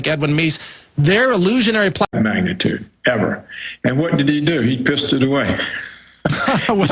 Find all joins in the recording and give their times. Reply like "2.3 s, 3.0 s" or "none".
none